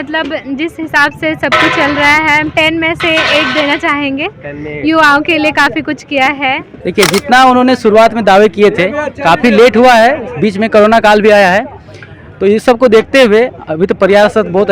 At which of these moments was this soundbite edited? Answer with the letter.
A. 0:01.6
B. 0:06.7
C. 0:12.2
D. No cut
B